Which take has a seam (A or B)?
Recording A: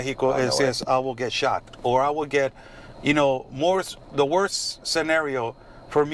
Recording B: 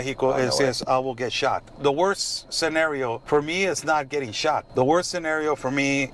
B